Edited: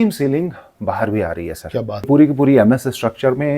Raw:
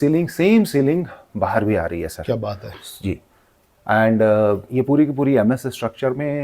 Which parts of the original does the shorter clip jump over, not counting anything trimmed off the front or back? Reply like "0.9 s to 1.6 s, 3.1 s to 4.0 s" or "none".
2.6 s to 4.9 s